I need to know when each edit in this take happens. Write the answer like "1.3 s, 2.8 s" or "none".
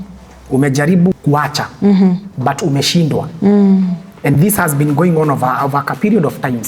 1.2 s